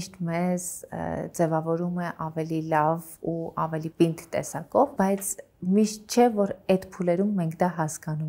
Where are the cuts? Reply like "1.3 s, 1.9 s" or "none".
none